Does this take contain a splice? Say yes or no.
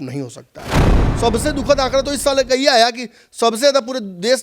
yes